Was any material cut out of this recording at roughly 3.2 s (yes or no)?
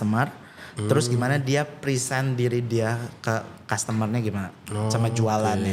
no